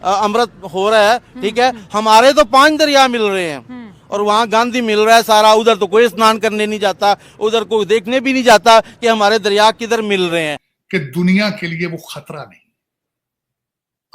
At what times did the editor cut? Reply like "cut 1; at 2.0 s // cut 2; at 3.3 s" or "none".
cut 1; at 10.7 s